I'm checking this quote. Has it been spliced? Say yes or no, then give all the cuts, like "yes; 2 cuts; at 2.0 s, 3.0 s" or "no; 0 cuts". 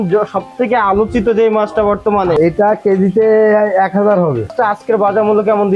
yes; 2 cuts; at 2.3 s, 4.5 s